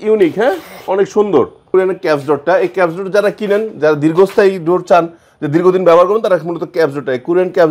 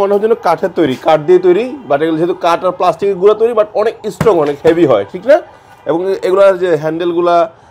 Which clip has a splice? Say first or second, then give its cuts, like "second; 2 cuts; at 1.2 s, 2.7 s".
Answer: first; 1 cut; at 1.7 s